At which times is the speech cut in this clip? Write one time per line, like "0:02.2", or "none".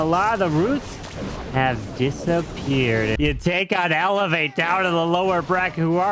0:03.1